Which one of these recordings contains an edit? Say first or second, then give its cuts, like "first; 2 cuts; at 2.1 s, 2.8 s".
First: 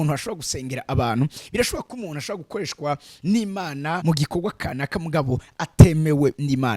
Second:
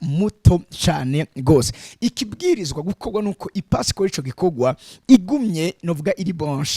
first; 1 cut; at 4.0 s